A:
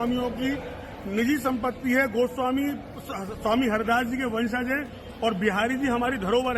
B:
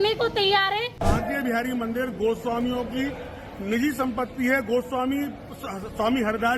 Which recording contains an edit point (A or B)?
B